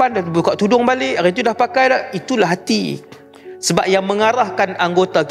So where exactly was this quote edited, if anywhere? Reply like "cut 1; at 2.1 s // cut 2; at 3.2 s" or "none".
none

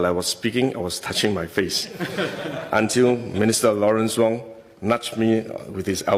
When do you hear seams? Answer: none

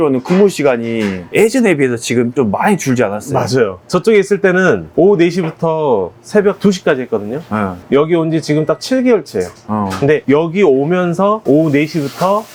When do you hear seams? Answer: none

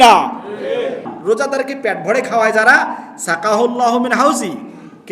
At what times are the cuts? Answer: cut 1; at 1.1 s

